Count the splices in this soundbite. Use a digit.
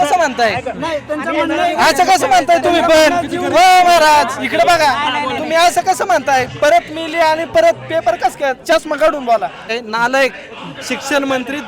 1